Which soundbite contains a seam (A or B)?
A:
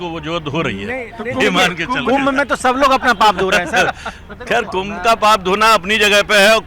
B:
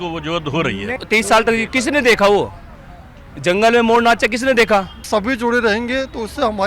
B